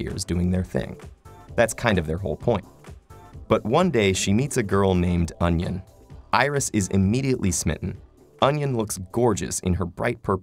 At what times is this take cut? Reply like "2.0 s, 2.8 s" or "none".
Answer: none